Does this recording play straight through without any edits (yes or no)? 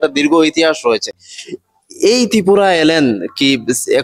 yes